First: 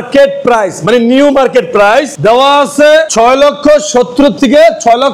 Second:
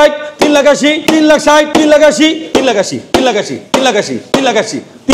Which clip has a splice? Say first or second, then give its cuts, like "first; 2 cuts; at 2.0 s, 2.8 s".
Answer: second; 3 cuts; at 1.0 s, 1.7 s, 2.4 s